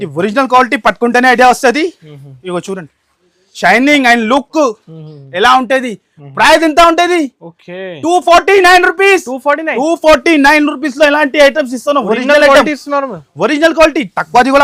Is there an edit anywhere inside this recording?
no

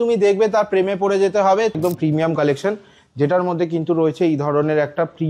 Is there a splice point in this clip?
yes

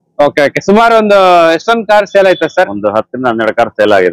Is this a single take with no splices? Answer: yes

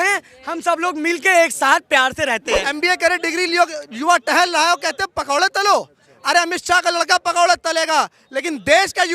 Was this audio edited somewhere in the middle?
yes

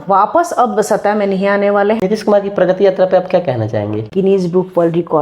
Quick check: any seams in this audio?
yes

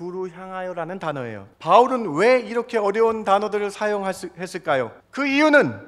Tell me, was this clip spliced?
yes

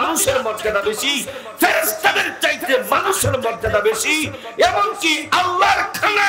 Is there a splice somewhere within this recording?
no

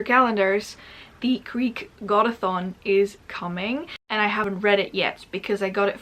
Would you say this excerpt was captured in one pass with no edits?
no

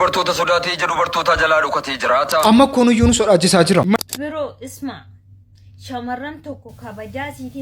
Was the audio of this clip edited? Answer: yes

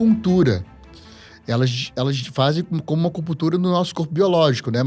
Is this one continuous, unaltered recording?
yes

